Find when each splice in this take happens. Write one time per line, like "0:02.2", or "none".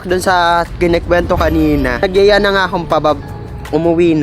0:02.0